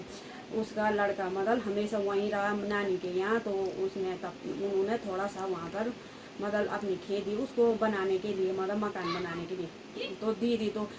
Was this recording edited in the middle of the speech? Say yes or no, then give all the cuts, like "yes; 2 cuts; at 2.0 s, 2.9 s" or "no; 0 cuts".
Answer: no; 0 cuts